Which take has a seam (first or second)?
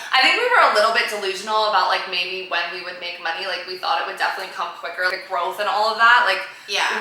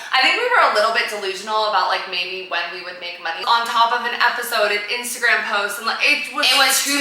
second